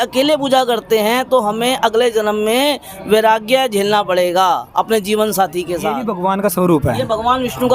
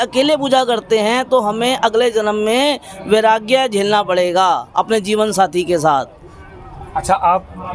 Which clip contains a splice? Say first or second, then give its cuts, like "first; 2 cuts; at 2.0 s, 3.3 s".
first; 1 cut; at 5.9 s